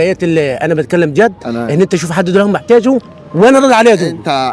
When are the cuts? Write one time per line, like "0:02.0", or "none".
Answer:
none